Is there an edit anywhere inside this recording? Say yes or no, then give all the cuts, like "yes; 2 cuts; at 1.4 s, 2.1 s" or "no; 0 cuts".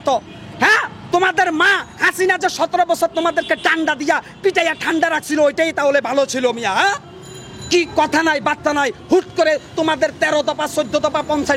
no; 0 cuts